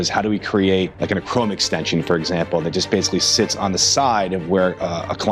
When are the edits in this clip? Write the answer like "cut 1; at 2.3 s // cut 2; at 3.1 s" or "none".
cut 1; at 0.9 s